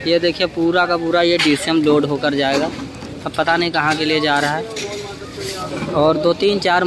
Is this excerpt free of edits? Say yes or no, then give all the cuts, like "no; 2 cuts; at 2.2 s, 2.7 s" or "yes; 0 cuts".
yes; 0 cuts